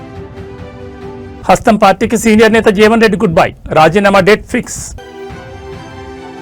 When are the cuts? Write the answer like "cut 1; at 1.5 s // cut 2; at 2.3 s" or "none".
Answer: cut 1; at 1.2 s